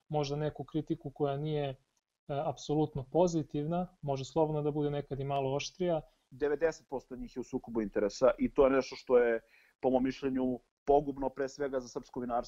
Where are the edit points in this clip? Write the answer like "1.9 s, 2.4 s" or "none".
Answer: 6.2 s